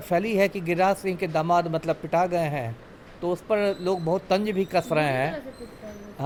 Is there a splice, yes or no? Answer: no